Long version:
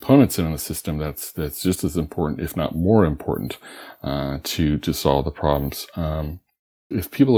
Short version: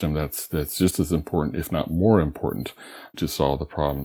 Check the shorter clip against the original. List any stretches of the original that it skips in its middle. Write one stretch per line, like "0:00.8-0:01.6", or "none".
0:04.0-0:04.8